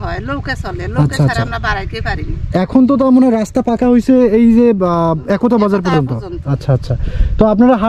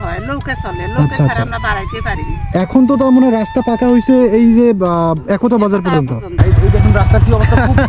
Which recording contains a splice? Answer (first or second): second